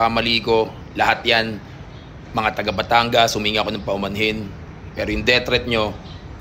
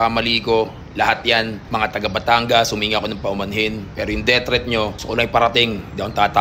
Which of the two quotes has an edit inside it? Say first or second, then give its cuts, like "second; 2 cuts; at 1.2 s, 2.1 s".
second; 3 cuts; at 1.6 s, 3.9 s, 5.0 s